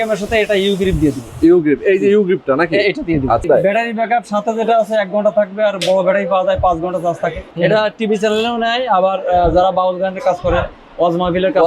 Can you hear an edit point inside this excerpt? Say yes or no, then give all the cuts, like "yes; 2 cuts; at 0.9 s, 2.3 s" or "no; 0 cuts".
yes; 2 cuts; at 3.4 s, 7.5 s